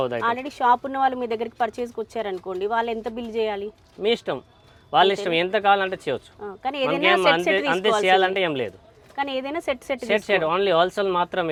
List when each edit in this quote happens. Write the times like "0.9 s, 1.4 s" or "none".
none